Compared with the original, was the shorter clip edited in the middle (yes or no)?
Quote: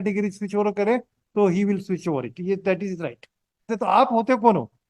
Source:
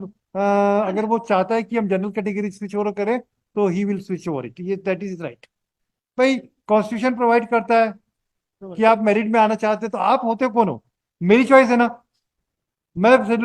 yes